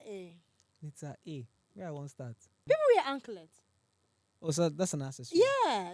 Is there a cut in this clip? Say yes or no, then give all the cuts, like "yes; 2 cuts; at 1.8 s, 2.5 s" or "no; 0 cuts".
yes; 1 cut; at 2.6 s